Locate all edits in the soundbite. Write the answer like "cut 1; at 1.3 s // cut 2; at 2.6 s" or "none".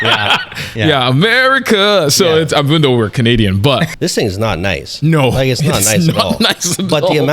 cut 1; at 3.9 s